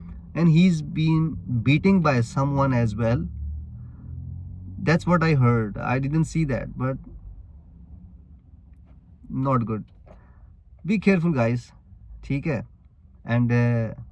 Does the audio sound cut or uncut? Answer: uncut